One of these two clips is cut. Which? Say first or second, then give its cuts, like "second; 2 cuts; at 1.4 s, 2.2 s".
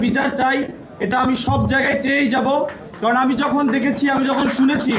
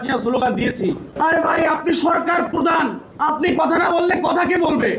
second; 2 cuts; at 1.1 s, 3.1 s